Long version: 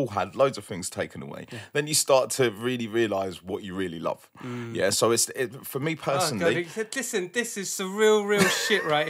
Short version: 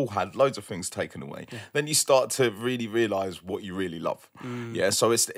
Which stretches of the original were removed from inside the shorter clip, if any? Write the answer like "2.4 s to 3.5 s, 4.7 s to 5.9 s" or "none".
none